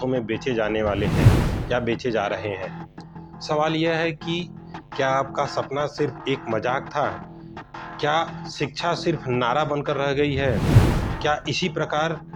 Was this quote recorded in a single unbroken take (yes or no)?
yes